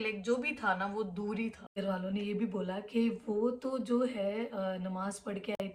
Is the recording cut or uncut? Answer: uncut